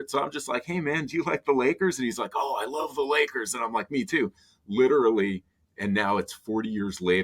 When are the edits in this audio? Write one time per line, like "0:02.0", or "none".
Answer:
none